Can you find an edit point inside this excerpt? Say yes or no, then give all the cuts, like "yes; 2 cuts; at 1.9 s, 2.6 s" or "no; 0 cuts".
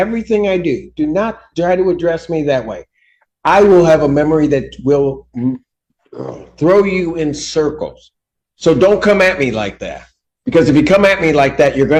no; 0 cuts